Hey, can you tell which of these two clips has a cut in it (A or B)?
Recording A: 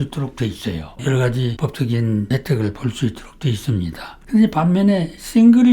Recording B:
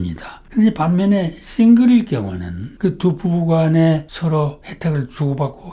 A